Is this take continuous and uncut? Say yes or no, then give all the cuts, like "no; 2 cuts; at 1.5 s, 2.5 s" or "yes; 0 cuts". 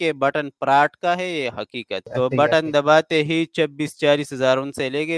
no; 1 cut; at 2.0 s